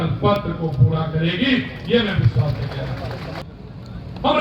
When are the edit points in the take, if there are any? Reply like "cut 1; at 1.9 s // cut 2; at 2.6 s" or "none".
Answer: cut 1; at 3.4 s